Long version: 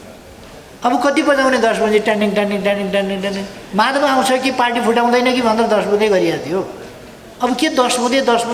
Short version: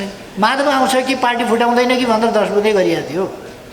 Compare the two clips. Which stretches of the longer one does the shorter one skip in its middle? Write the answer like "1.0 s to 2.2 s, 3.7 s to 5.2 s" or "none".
none

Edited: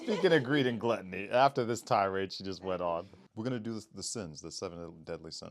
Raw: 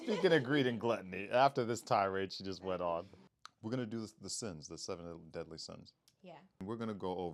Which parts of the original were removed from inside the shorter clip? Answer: 3.2 s to 3.5 s

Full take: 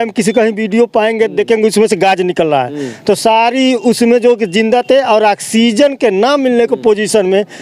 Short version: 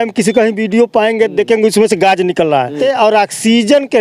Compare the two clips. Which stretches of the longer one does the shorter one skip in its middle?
2.8 s to 4.9 s

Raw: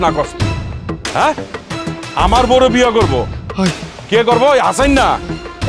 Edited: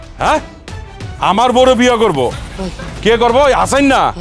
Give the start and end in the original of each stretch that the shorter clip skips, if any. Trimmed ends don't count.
3.6 s to 3.7 s

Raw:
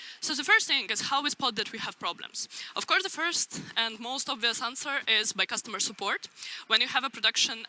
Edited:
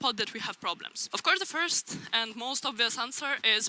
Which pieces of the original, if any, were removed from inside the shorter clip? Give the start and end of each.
2.3 s to 2.6 s

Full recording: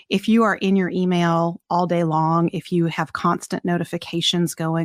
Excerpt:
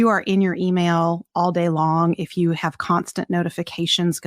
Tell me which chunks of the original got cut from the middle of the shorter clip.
none

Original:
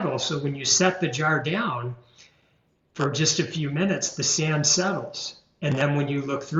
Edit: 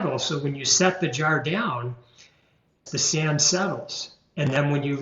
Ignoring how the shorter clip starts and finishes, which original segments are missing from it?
2.8 s to 4.1 s

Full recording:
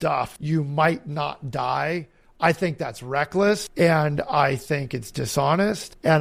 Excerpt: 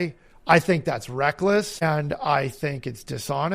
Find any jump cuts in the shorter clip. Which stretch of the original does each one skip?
3.8 s to 3.9 s

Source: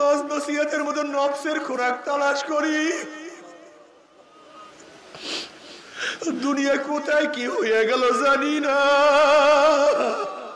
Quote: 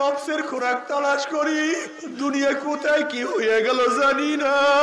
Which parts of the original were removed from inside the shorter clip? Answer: 3.2 s to 6.2 s

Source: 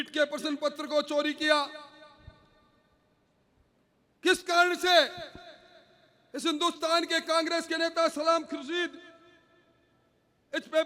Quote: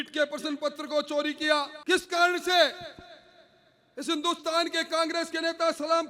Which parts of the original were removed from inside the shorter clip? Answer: 1.8 s to 4.1 s

